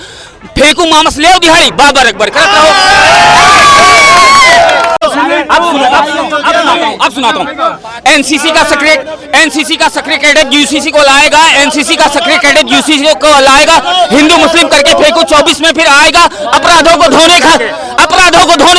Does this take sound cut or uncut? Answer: cut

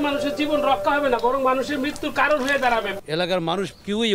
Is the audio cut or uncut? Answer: uncut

